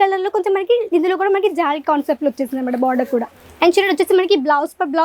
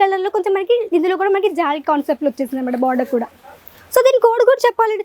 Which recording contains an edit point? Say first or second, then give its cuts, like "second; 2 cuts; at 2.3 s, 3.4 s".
first; 1 cut; at 3.4 s